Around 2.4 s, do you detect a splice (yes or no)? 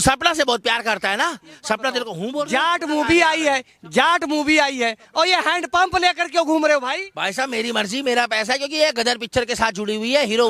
yes